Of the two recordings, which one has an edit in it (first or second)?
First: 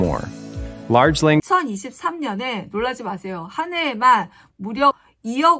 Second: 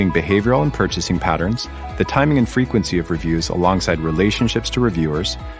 first